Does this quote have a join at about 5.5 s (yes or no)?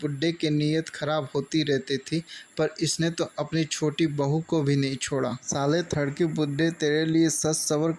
yes